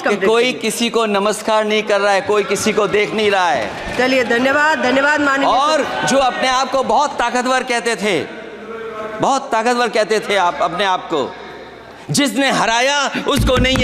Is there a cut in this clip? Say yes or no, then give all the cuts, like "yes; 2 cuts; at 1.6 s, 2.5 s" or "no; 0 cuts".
no; 0 cuts